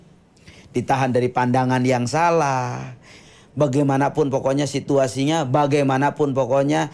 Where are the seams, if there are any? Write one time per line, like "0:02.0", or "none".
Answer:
0:03.2